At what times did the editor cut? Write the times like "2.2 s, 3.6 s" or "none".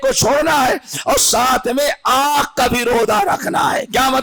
none